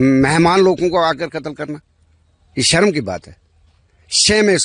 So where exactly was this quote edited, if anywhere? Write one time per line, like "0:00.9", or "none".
none